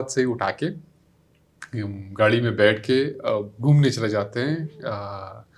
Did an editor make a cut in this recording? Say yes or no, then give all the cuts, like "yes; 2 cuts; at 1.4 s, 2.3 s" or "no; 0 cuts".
no; 0 cuts